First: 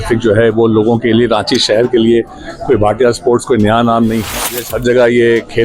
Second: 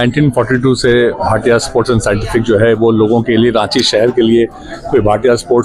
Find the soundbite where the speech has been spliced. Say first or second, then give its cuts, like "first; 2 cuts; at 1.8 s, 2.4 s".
first; 1 cut; at 4.4 s